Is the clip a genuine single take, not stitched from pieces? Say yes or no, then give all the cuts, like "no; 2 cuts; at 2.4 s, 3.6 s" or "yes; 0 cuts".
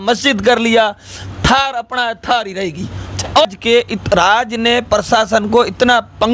no; 1 cut; at 3.4 s